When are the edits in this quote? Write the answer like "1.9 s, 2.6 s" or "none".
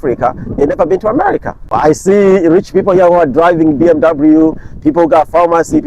1.7 s

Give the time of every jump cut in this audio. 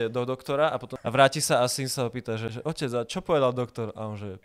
0.9 s, 2.5 s

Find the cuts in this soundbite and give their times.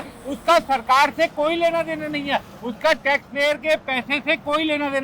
none

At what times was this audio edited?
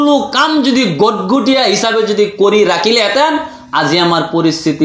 none

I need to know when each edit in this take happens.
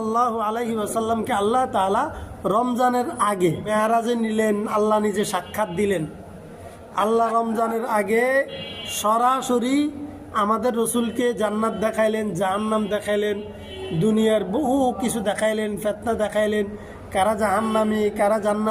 3.6 s

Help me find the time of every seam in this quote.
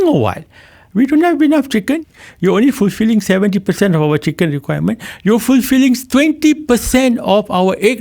2.0 s

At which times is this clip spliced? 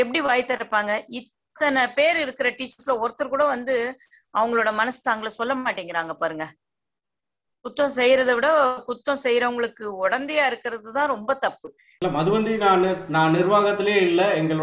11.8 s

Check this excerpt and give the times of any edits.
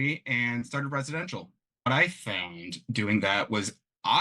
1.9 s

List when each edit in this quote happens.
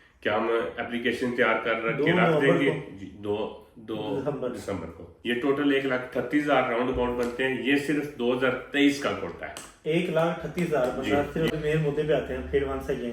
5.2 s, 11.5 s

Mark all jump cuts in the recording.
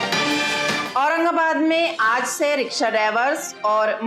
0.9 s

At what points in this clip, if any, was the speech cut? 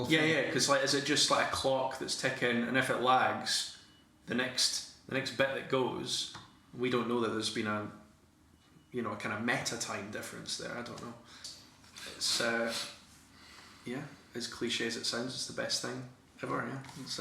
11.4 s

